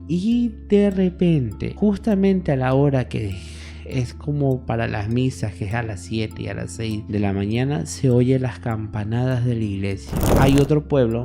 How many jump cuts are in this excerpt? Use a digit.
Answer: 1